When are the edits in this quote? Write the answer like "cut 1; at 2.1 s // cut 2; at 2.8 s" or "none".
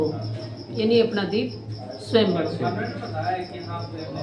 none